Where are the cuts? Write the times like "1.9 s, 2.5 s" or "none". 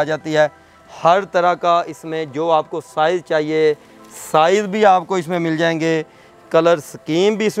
none